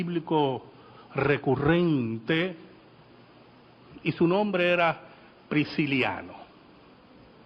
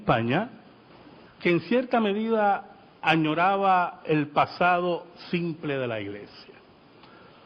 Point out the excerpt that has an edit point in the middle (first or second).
second